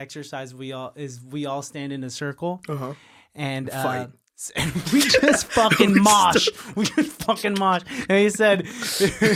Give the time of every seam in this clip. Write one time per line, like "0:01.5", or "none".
none